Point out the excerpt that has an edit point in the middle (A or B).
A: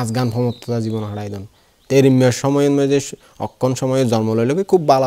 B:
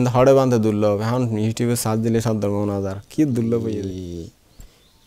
B